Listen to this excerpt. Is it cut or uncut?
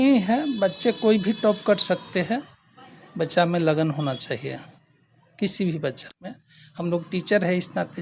uncut